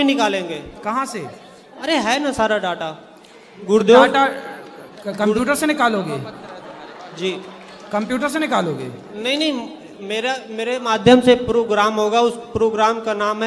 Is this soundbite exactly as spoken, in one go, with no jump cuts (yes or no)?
yes